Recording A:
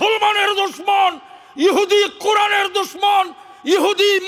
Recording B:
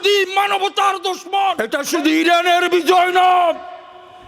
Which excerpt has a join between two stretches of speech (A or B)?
B